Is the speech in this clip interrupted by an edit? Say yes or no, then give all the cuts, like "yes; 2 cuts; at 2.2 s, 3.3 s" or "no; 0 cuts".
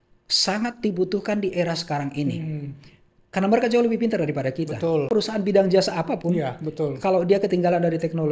yes; 1 cut; at 5.1 s